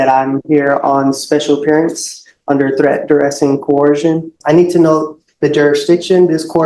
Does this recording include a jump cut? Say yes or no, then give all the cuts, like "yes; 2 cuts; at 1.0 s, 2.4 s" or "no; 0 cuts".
yes; 1 cut; at 4.4 s